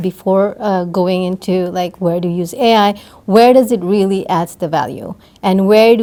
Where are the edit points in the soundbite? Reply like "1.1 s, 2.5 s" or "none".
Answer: none